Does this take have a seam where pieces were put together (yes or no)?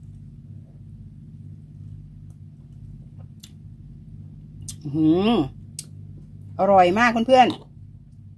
no